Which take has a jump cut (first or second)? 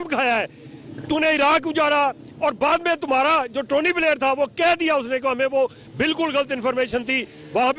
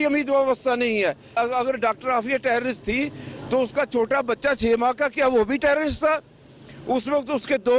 second